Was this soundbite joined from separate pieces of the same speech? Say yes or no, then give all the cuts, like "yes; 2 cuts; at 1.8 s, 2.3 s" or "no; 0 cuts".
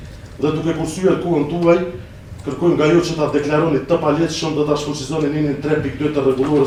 no; 0 cuts